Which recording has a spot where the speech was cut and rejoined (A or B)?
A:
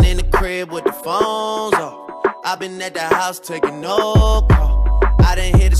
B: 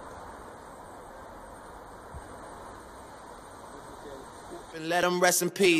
A